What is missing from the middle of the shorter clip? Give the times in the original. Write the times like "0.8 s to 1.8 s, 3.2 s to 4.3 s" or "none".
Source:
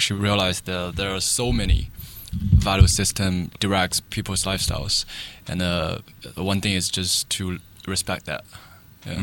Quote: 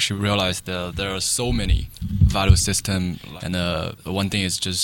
1.9 s to 2.2 s, 3.5 s to 5.3 s, 6.0 s to 6.3 s